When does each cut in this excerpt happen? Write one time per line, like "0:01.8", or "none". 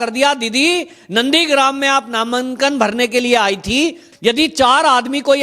0:04.0